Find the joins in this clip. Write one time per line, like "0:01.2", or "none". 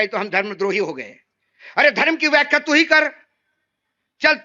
none